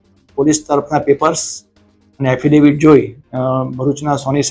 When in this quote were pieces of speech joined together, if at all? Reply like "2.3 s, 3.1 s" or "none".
none